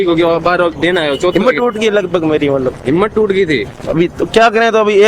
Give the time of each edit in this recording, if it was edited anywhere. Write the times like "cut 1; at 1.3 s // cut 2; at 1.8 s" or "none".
none